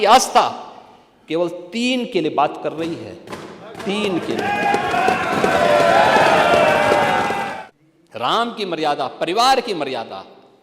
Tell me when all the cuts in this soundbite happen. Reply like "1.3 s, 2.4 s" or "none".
7.5 s

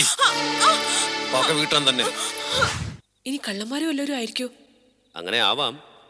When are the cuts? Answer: 2.8 s

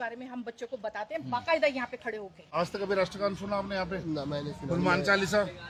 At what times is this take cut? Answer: none

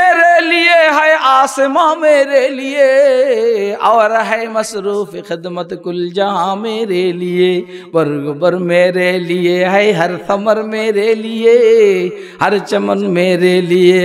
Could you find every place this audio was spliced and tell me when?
none

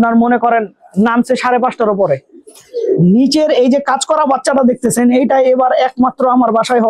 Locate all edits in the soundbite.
2.3 s

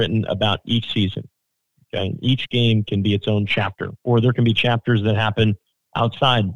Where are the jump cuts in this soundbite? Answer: none

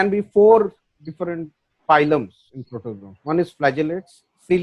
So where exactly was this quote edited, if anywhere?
none

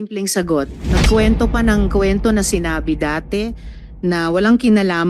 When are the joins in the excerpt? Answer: none

